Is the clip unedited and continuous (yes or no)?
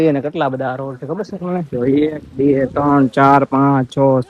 yes